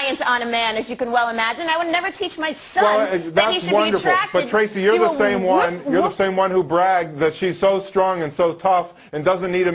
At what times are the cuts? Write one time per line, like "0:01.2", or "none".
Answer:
0:01.1

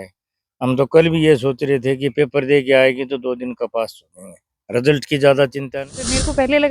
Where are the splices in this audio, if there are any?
0:05.6

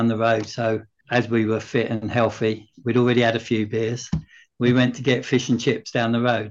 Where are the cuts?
0:00.9

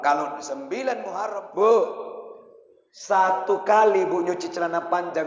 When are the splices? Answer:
0:01.1

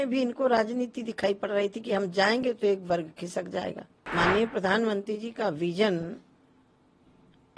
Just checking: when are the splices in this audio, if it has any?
0:04.1

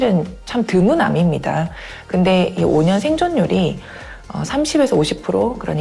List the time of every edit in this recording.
none

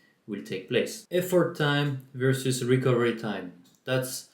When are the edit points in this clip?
0:01.0

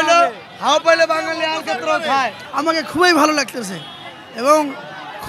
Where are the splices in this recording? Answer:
0:02.4

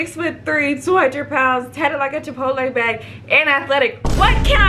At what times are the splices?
none

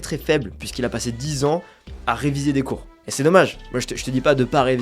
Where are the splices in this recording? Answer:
none

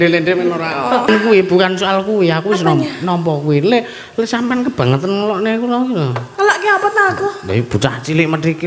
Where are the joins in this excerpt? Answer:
0:01.1

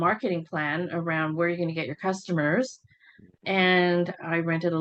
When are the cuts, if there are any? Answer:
none

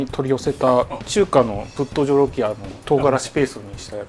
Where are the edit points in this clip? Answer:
0:01.0
0:02.7

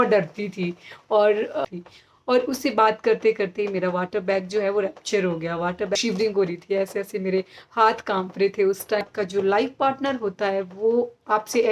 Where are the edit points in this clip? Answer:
0:01.6
0:06.0
0:09.0

